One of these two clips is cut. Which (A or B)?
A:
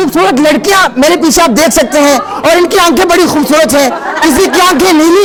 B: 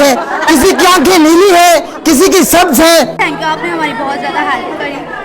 B